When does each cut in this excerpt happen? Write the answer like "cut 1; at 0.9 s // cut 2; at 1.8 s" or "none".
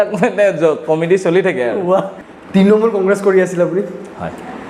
cut 1; at 2.1 s